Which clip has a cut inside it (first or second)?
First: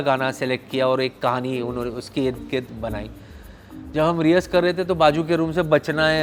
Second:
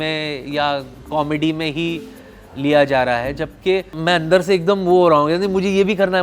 second